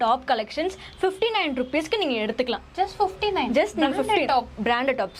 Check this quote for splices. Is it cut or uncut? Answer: uncut